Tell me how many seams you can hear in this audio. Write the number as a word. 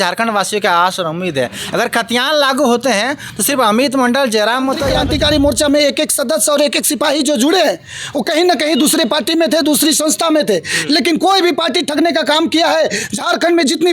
one